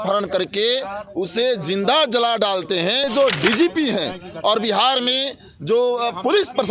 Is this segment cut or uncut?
cut